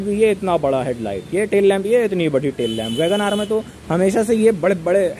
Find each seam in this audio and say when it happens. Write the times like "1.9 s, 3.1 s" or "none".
none